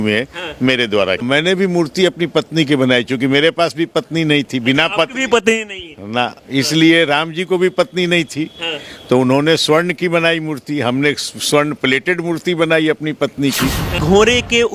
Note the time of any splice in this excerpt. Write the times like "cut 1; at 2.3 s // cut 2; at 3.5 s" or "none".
cut 1; at 1.2 s // cut 2; at 14.0 s